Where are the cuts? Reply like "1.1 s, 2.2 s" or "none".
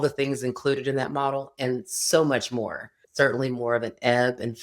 3.0 s